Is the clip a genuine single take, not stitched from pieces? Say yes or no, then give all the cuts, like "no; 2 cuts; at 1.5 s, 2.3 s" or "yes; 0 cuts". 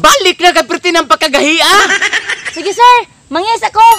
no; 1 cut; at 1.9 s